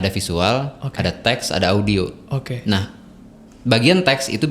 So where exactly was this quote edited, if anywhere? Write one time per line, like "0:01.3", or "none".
none